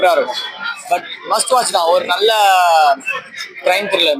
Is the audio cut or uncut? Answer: uncut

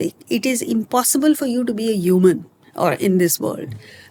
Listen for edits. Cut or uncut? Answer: uncut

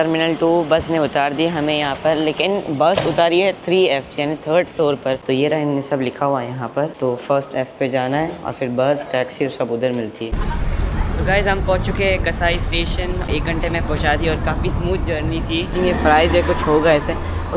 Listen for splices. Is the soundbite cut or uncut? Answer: cut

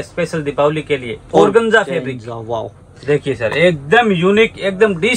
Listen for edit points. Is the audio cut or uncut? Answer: uncut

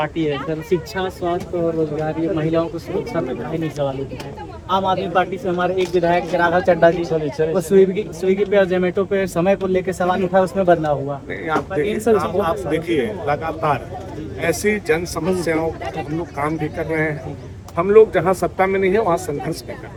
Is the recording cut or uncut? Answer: uncut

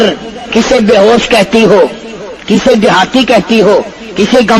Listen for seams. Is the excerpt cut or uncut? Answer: uncut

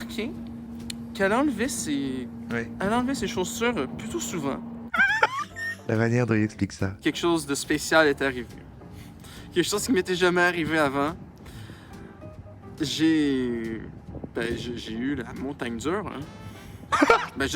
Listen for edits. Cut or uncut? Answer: cut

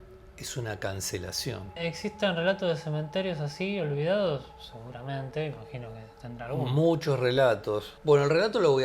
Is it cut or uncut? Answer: cut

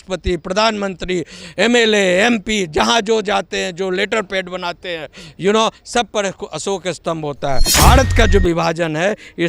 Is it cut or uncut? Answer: cut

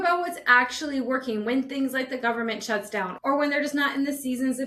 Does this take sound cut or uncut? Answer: uncut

